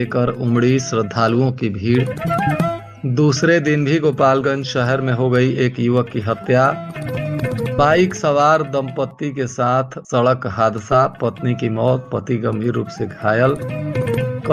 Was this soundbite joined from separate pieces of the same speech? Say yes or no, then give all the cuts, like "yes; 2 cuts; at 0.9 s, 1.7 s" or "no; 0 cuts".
no; 0 cuts